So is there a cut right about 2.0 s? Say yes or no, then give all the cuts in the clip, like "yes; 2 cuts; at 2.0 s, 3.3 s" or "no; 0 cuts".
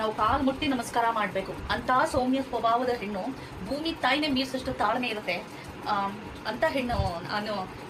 no; 0 cuts